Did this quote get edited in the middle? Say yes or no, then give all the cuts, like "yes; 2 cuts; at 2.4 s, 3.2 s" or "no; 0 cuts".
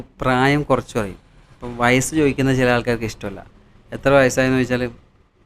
no; 0 cuts